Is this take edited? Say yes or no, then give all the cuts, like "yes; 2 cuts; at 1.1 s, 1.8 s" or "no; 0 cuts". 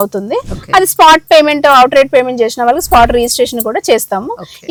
no; 0 cuts